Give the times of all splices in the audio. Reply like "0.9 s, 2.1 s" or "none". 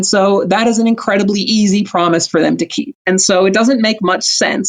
3.0 s